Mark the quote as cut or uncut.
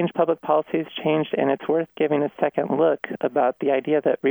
uncut